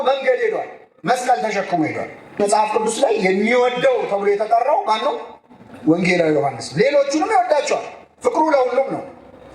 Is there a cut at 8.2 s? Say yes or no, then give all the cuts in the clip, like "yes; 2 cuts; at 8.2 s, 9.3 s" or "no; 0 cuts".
no; 1 cut; at 2.4 s